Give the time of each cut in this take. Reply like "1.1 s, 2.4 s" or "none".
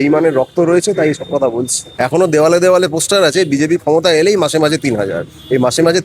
1.8 s